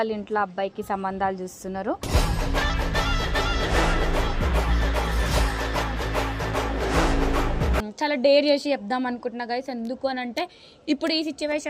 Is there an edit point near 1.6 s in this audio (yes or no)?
no